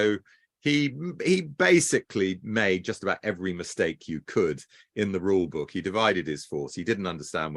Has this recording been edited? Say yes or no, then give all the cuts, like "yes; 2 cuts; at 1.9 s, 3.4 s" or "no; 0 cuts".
no; 0 cuts